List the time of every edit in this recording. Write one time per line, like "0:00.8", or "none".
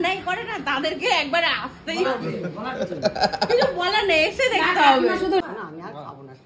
0:05.4